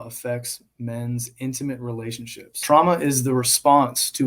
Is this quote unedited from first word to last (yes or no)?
no